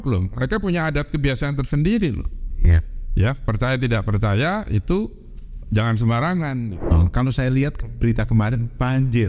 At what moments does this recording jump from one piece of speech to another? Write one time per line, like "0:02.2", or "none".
0:06.9